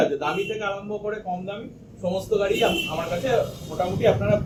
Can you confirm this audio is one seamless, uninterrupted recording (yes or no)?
yes